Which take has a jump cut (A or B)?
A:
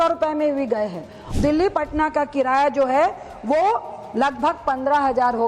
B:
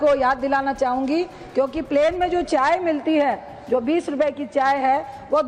A